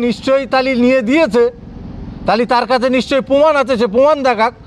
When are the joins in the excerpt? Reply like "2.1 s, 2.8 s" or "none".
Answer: none